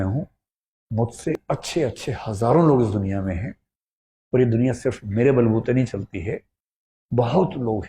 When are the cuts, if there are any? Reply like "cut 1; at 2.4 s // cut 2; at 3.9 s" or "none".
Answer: cut 1; at 1.3 s